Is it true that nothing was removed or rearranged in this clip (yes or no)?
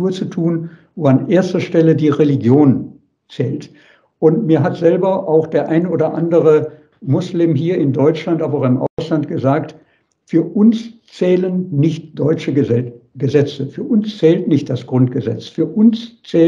yes